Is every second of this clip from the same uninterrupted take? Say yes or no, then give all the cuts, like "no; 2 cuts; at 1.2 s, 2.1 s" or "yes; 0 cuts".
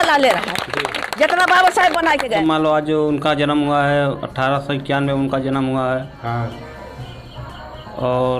no; 1 cut; at 2.4 s